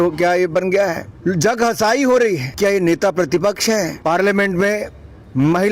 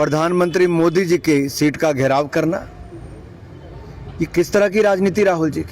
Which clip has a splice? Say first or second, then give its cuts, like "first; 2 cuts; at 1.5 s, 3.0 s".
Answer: first; 3 cuts; at 1.1 s, 2.6 s, 3.9 s